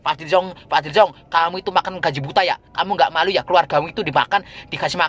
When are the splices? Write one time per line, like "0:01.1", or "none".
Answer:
none